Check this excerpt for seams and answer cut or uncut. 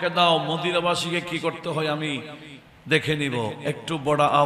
uncut